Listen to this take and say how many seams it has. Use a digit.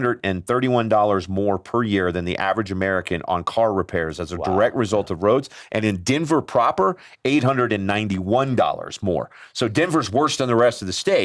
0